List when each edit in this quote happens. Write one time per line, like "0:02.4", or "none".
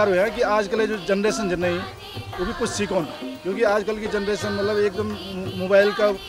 0:03.2